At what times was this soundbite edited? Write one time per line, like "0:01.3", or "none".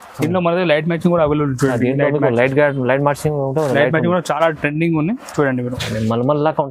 0:05.7